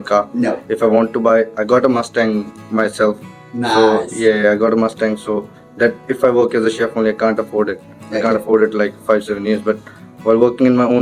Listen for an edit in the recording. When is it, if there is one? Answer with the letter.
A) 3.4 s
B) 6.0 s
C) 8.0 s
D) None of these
D